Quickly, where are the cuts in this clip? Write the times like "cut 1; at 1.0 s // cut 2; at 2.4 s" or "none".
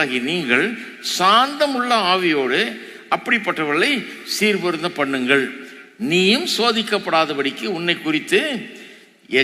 none